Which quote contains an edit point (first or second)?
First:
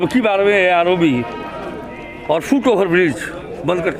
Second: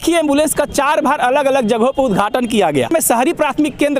second